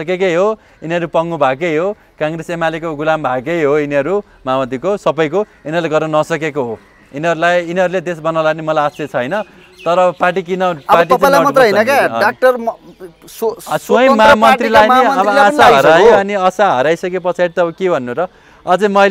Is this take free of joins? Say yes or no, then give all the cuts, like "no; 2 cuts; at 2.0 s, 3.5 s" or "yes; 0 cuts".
yes; 0 cuts